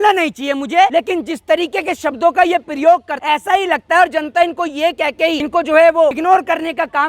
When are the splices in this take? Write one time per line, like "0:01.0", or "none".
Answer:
0:00.9
0:03.1
0:05.4
0:06.2